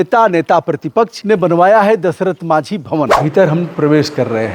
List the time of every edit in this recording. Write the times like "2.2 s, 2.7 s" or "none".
1.2 s, 3.2 s